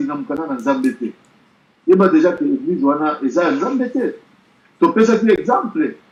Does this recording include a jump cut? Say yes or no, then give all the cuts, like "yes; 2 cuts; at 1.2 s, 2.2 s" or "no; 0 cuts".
no; 0 cuts